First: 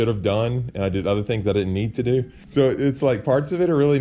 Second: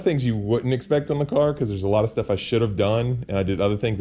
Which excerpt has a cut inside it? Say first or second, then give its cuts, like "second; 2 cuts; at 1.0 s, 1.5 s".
first; 1 cut; at 2.4 s